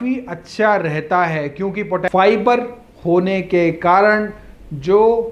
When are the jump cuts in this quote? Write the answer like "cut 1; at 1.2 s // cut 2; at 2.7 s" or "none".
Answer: cut 1; at 2.0 s